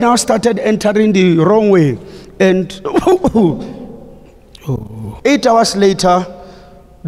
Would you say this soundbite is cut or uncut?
uncut